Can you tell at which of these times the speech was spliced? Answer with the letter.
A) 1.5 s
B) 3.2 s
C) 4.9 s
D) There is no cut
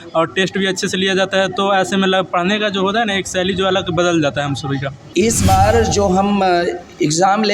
C